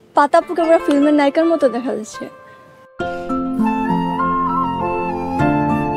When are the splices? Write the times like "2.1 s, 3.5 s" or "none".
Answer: none

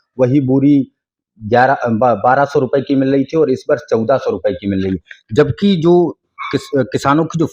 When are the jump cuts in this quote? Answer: none

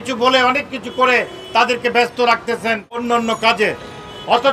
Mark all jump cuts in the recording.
2.9 s

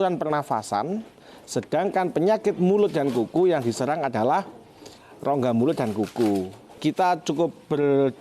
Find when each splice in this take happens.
6.8 s

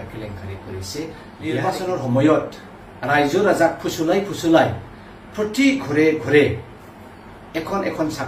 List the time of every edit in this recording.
1.6 s

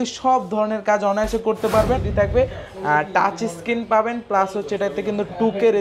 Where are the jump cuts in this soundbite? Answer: 2.1 s

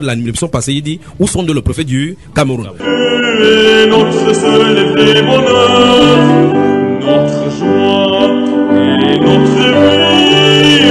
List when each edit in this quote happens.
2.6 s

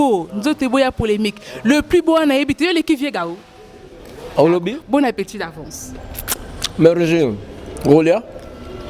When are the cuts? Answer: 4.8 s

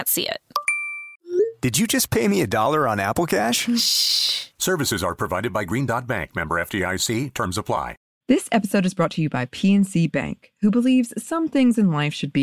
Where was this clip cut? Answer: 8.1 s

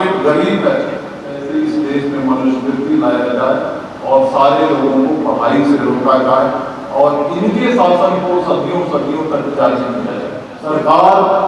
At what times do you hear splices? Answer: 1.4 s, 10.5 s

